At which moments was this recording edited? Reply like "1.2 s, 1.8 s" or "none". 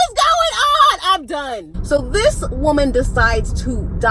1.7 s